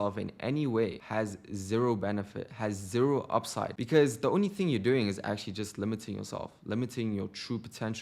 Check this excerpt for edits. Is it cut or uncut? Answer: cut